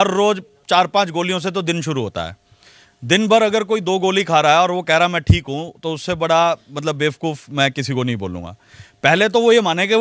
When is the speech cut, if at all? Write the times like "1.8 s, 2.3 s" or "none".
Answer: none